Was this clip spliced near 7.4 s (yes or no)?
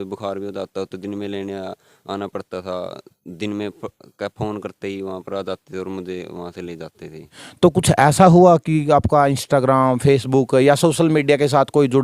yes